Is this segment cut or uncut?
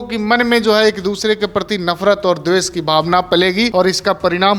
cut